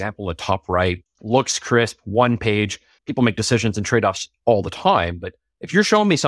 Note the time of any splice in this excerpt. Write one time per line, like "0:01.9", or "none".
0:01.1